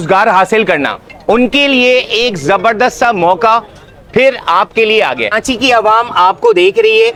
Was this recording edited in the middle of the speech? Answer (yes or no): no